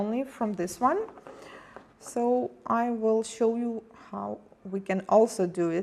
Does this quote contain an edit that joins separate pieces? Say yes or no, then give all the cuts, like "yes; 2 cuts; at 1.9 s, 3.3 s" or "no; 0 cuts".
yes; 1 cut; at 1.2 s